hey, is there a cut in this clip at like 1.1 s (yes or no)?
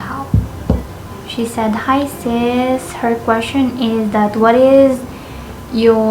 yes